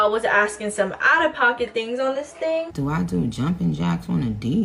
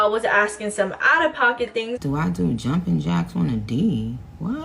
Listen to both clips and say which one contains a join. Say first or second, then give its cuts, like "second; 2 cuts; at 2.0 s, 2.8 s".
second; 1 cut; at 2.0 s